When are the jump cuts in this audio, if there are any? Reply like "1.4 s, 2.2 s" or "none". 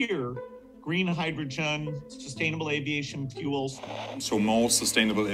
4.2 s